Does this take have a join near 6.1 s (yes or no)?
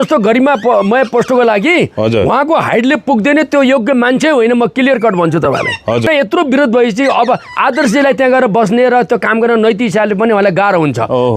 yes